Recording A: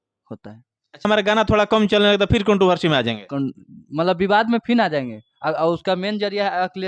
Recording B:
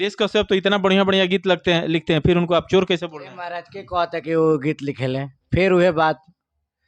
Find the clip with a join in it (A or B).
A